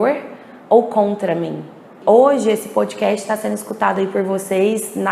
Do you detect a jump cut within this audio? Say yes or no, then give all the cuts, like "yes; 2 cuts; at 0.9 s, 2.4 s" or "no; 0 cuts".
yes; 1 cut; at 1.9 s